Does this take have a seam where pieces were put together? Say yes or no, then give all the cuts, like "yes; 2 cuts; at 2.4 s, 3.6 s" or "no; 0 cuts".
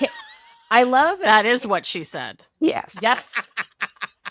no; 0 cuts